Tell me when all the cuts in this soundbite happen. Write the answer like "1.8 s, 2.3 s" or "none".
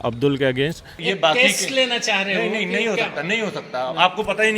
0.9 s